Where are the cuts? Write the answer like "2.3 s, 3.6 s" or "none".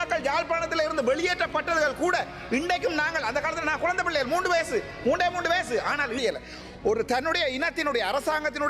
6.2 s